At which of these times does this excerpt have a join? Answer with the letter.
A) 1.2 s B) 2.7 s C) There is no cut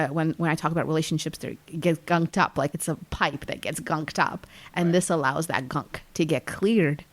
B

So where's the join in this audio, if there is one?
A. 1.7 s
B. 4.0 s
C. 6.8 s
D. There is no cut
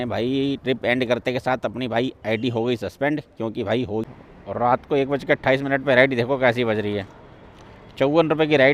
B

